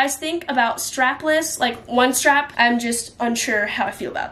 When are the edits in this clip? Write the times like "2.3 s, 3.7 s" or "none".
none